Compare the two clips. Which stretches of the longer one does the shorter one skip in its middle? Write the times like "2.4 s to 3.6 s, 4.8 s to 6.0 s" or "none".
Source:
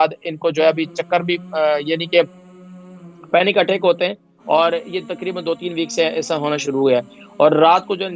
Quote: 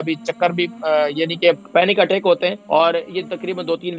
2.3 s to 3.2 s, 4.2 s to 4.4 s